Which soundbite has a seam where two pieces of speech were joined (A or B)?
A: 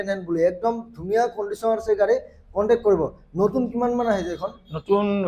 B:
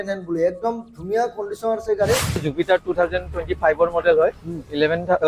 B